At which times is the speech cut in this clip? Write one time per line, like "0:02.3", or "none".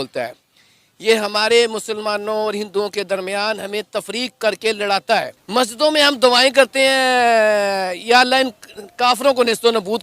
0:05.4